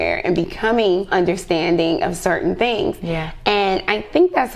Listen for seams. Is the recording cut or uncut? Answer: cut